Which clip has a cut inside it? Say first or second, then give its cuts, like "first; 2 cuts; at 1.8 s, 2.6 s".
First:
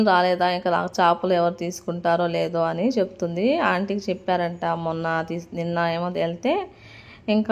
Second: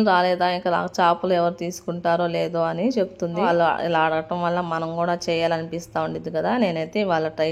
second; 1 cut; at 3.4 s